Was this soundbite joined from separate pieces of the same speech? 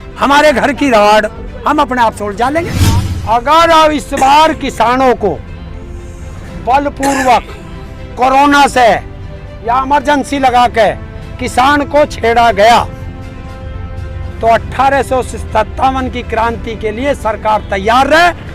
yes; 1 cut; at 2.8 s

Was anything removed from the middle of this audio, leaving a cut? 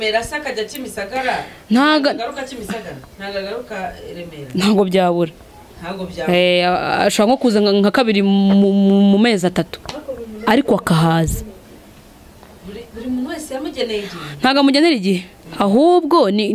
no; 0 cuts

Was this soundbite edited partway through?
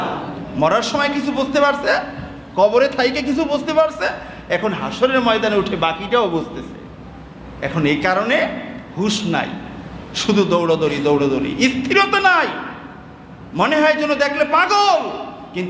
no; 0 cuts

